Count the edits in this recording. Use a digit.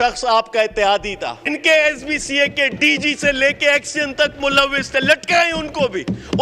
1